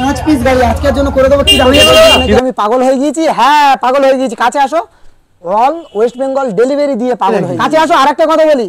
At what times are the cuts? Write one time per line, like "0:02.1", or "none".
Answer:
0:02.4
0:07.5